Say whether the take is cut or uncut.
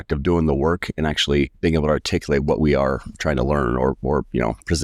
cut